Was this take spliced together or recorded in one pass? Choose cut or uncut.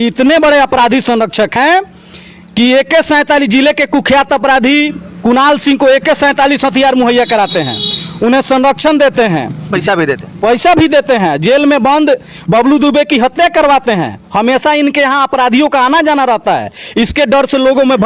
cut